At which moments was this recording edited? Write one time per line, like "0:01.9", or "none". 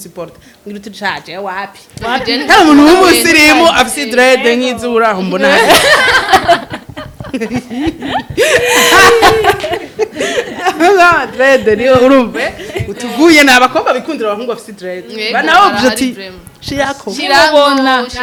none

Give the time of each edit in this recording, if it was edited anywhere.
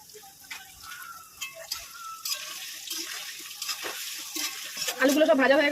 0:04.8

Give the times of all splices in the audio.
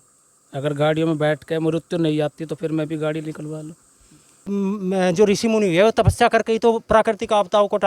0:04.4

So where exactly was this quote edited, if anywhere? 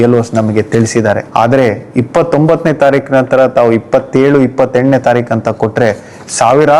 0:01.2

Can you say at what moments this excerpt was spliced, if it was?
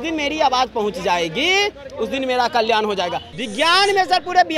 0:03.2

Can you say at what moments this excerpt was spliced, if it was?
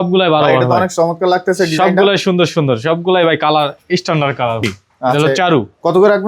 0:04.7

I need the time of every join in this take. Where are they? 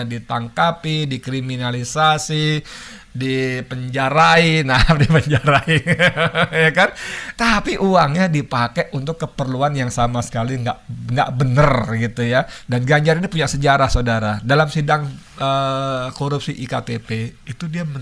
0:12.6

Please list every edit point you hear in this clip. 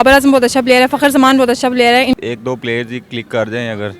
0:02.1

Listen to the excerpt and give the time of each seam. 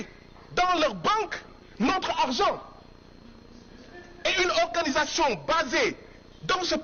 none

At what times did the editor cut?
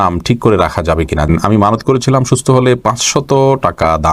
0:01.3

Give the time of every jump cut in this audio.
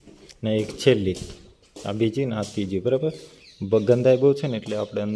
none

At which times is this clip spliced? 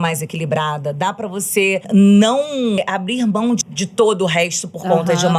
0:01.9
0:02.8
0:03.7

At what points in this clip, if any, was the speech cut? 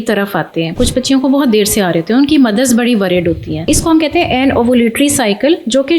0:00.8
0:03.7

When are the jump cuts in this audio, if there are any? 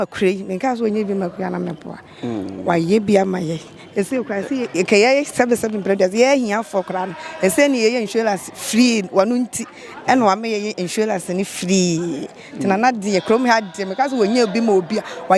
none

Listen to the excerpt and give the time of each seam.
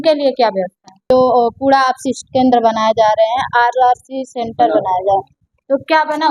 0:01.0

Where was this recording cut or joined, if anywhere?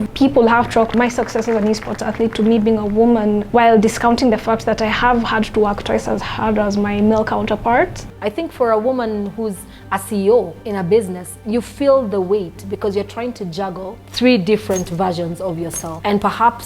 none

